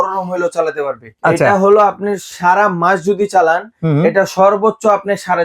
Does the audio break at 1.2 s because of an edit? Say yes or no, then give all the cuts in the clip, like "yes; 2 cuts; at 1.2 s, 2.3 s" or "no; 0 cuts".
yes; 1 cut; at 1.2 s